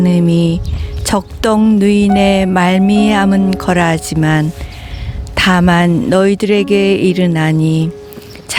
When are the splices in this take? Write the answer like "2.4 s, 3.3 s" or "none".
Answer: none